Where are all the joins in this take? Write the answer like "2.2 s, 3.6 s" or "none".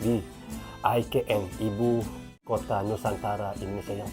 2.3 s